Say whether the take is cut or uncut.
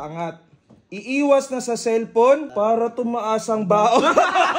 cut